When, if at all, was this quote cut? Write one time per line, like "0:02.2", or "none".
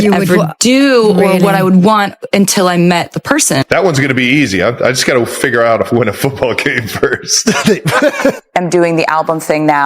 0:03.6
0:08.2